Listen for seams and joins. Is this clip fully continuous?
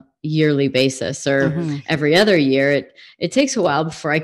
yes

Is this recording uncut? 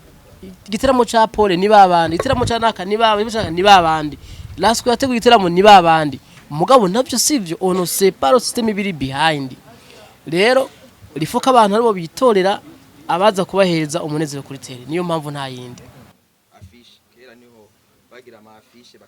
no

